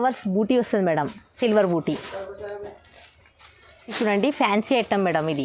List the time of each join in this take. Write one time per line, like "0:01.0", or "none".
0:03.9